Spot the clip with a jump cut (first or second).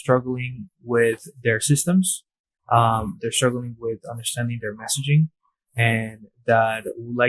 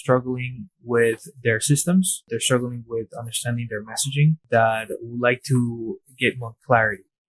second